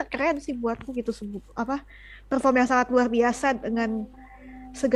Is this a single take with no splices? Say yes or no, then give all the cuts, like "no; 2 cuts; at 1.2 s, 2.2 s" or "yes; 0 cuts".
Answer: yes; 0 cuts